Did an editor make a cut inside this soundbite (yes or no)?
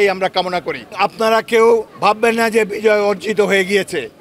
yes